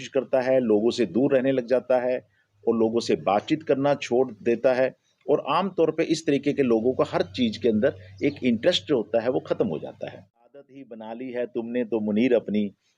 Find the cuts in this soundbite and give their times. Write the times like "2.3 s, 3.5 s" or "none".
10.7 s